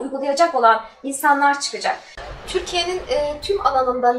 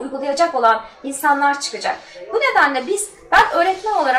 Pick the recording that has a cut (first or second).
first